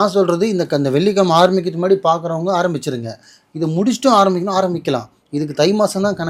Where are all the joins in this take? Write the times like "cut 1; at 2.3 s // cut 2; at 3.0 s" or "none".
none